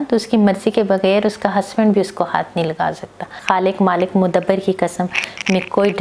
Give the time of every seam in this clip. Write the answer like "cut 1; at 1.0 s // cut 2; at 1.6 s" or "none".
cut 1; at 3.3 s